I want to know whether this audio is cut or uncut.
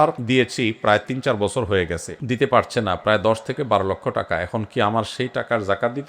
uncut